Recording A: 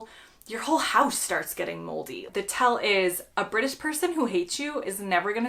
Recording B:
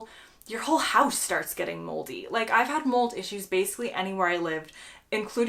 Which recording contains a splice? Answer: A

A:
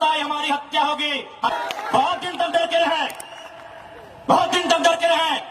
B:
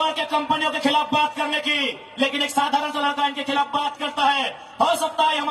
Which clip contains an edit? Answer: A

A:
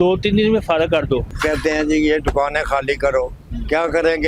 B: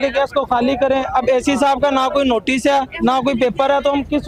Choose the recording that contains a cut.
A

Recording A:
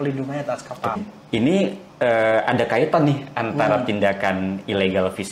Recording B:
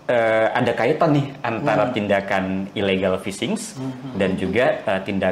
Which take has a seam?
A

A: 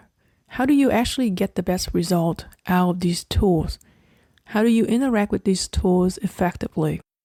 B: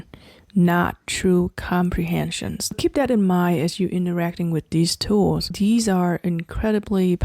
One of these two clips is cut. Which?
B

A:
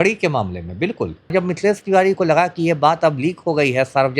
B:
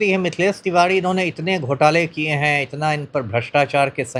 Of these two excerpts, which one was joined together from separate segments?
A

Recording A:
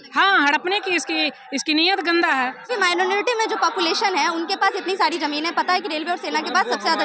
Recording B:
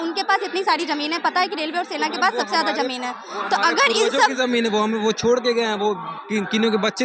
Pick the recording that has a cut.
A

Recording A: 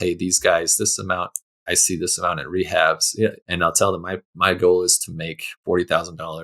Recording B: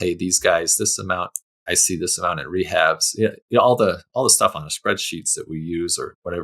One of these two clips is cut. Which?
A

